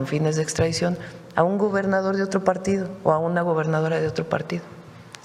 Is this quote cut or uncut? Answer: uncut